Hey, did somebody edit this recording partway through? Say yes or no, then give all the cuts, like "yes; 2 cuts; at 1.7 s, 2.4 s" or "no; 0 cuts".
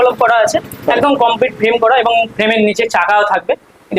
no; 0 cuts